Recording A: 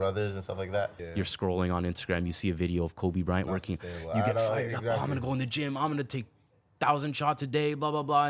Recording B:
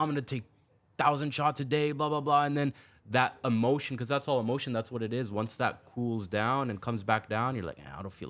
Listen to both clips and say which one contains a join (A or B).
A